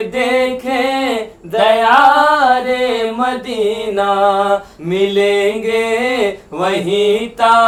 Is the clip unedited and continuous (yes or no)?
yes